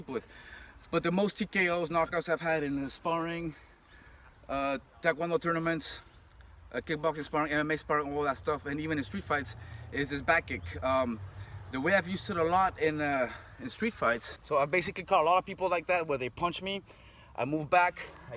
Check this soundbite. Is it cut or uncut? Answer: cut